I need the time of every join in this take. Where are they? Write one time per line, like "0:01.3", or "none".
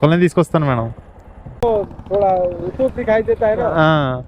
0:01.6